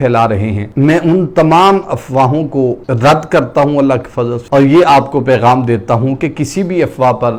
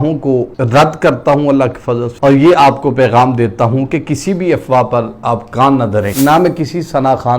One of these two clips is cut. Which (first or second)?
second